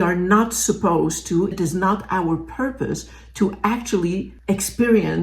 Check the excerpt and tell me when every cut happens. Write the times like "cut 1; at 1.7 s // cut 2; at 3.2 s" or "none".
cut 1; at 1.5 s